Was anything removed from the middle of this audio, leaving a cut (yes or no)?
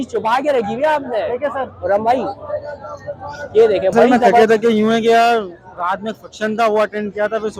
yes